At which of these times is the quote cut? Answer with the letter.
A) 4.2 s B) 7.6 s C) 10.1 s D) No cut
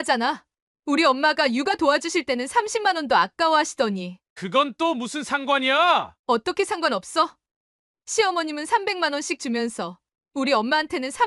D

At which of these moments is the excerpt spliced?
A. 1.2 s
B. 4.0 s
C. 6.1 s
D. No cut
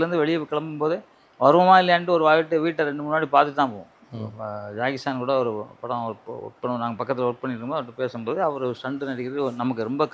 B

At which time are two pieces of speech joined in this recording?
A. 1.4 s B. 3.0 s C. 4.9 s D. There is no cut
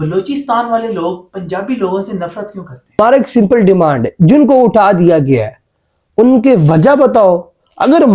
B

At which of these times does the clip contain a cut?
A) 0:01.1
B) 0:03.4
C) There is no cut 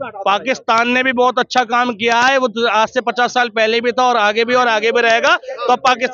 C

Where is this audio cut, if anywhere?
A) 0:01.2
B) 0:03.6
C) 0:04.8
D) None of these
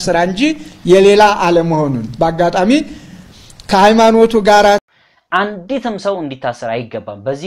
C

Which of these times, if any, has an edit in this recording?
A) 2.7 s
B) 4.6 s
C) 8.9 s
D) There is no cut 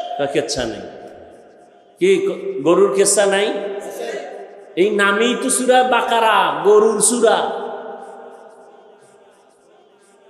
D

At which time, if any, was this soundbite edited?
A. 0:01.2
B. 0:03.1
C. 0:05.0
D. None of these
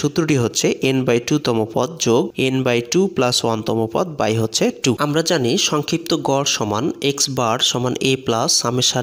C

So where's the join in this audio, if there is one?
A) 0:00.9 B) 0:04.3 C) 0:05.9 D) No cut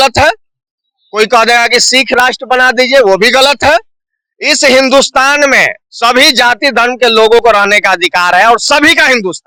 D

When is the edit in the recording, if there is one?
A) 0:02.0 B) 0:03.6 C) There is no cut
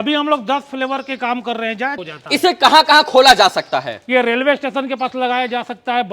A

